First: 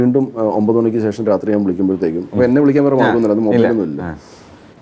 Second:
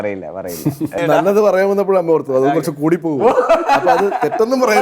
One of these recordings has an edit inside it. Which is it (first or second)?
second